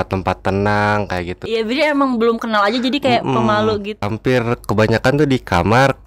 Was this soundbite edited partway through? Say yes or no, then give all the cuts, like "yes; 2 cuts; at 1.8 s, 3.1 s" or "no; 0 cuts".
yes; 2 cuts; at 1.4 s, 3.9 s